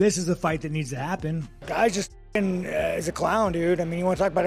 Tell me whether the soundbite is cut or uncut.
cut